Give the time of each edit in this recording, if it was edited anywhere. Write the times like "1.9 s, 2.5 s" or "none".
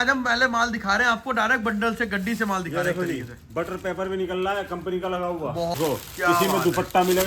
5.7 s